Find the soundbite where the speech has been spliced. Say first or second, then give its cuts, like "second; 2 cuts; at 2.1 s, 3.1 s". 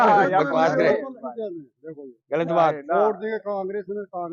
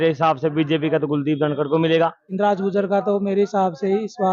second; 1 cut; at 2.2 s